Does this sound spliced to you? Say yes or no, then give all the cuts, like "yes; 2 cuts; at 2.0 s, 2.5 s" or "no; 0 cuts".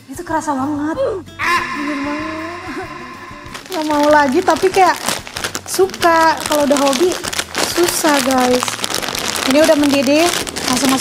no; 0 cuts